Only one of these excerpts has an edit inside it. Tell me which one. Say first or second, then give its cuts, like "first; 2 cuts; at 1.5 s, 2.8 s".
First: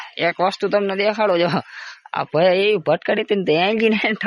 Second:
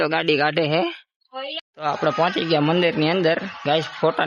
second; 1 cut; at 1.6 s